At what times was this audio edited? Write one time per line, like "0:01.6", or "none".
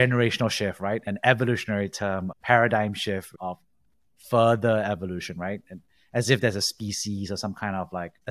none